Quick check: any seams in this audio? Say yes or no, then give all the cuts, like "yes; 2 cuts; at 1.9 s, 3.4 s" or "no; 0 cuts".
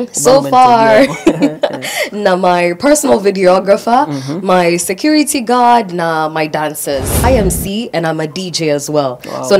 yes; 1 cut; at 7.2 s